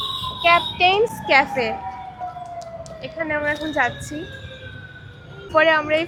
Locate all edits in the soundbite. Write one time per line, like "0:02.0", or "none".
none